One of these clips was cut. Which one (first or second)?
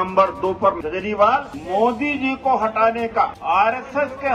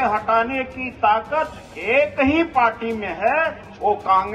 first